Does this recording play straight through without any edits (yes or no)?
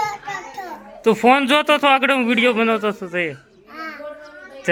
yes